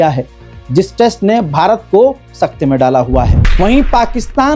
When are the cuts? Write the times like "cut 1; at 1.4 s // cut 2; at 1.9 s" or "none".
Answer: cut 1; at 3.4 s